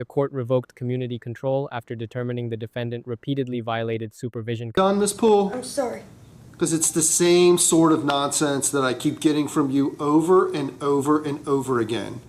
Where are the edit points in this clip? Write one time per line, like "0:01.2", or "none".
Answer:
0:04.7